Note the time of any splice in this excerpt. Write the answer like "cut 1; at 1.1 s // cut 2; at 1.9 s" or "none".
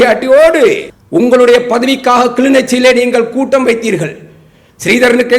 cut 1; at 0.9 s